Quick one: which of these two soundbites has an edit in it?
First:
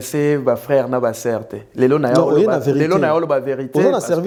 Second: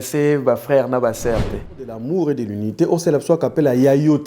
second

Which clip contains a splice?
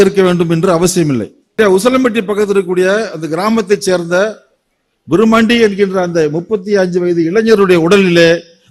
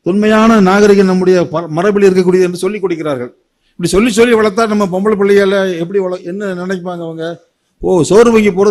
first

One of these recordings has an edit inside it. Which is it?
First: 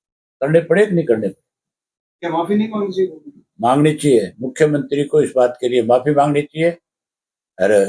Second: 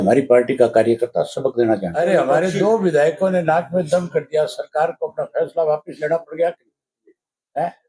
second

